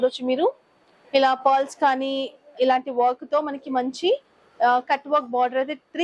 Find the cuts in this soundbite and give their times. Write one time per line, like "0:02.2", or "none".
none